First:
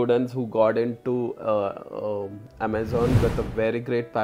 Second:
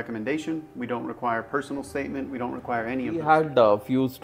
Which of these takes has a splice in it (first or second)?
second